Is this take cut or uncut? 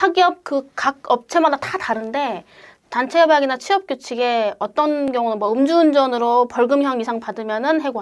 uncut